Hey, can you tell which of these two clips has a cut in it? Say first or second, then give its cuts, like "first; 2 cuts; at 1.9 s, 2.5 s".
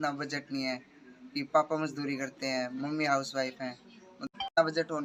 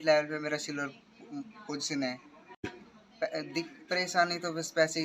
second; 1 cut; at 2.6 s